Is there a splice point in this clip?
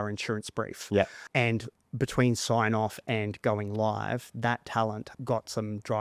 yes; 2 cuts; at 0.9 s, 5.1 s

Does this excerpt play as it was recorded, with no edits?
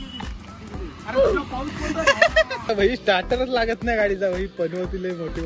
no; 1 cut; at 2.7 s

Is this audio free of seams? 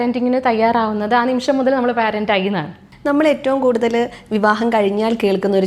yes; 0 cuts

